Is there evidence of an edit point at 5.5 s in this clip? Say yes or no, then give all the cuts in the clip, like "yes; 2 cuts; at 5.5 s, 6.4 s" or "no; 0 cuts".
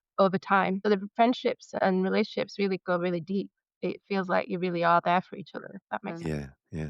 no; 3 cuts; at 0.8 s, 1.7 s, 3.6 s